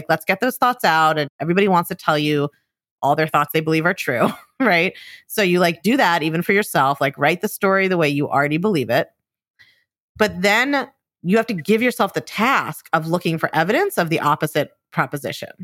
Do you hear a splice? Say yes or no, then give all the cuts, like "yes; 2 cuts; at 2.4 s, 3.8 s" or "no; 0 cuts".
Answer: yes; 1 cut; at 1.3 s